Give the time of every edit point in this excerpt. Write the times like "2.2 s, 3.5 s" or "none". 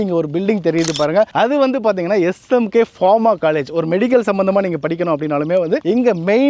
none